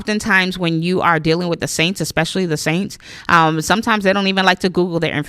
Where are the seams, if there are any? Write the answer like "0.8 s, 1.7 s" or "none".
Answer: none